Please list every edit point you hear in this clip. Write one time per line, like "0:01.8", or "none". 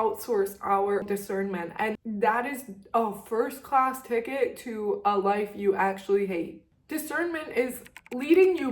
0:01.1
0:06.6